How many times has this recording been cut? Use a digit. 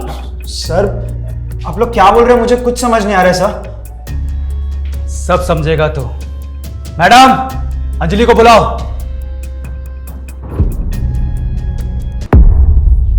1